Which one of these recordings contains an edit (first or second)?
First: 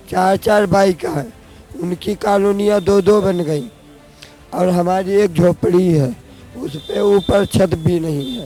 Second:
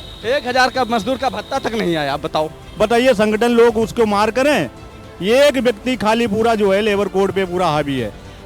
second